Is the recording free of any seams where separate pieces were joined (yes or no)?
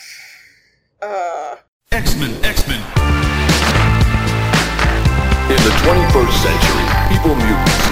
no